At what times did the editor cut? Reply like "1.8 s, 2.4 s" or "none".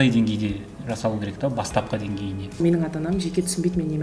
2.6 s